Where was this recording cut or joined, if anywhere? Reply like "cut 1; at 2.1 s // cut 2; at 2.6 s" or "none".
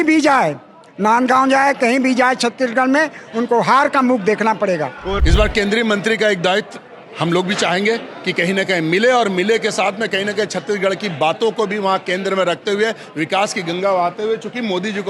cut 1; at 5.2 s